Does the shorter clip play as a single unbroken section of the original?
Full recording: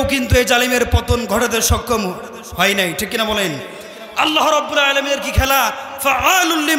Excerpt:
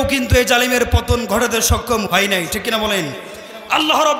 no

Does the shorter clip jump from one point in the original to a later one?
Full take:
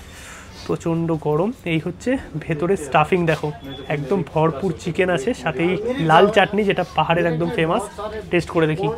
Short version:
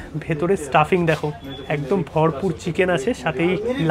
no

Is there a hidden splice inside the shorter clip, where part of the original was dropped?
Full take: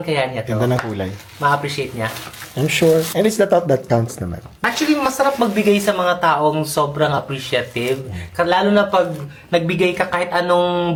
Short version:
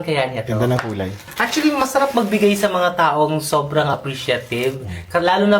yes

